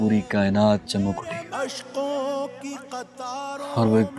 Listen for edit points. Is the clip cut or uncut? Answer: cut